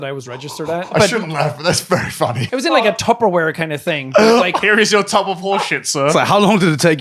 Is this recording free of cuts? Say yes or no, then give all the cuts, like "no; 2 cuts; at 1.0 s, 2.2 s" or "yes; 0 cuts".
no; 3 cuts; at 0.9 s, 2.4 s, 6.1 s